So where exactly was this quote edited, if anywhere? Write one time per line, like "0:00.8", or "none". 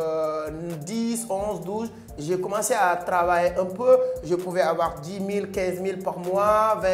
none